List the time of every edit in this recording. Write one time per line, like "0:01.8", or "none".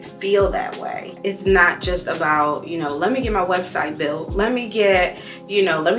0:01.1